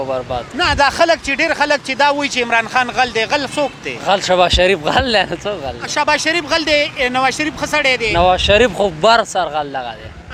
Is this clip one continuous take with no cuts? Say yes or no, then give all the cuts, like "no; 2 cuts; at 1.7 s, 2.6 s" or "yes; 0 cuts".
yes; 0 cuts